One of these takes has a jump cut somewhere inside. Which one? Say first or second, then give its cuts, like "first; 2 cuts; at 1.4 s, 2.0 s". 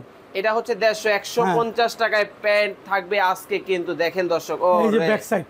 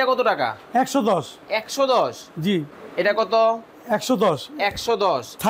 second; 1 cut; at 2.8 s